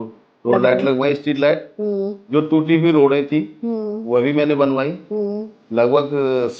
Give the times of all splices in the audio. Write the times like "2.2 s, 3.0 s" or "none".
none